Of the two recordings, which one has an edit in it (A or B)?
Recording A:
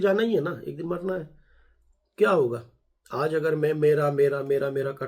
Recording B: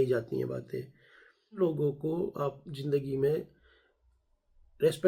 B